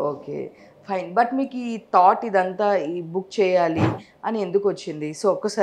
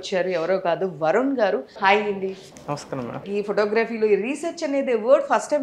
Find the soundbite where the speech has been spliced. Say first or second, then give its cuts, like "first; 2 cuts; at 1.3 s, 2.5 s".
second; 2 cuts; at 1.7 s, 3.2 s